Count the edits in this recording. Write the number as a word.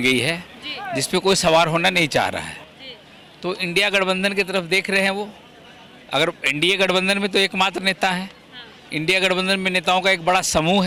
zero